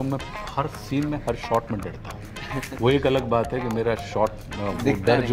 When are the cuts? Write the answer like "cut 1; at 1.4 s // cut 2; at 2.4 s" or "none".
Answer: none

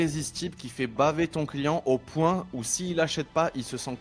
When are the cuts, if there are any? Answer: none

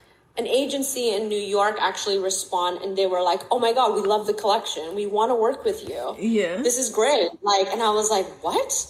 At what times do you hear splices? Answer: none

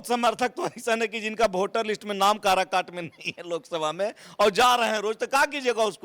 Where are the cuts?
none

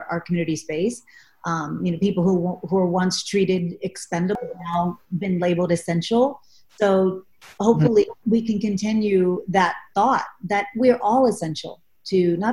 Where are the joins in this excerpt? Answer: cut 1; at 4.3 s // cut 2; at 8.2 s

